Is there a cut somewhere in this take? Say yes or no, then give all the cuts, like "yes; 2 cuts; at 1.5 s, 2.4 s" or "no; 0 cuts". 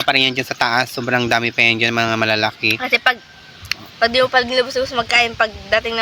no; 0 cuts